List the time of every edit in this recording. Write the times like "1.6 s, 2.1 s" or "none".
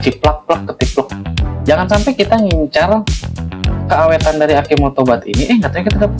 1.6 s